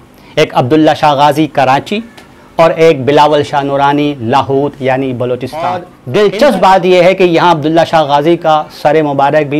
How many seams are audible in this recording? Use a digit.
1